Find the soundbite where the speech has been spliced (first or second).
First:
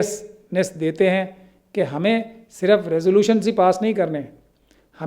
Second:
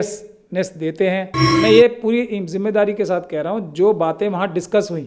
second